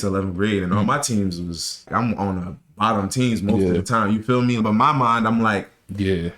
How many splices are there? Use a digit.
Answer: 2